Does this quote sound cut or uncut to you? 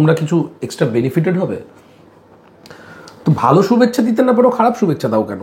uncut